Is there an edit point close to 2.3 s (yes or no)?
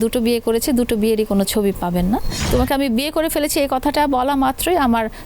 yes